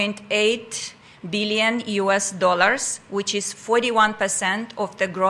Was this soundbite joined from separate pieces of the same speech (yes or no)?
no